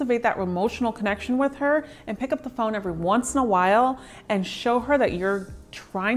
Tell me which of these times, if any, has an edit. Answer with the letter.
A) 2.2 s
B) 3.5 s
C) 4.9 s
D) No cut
D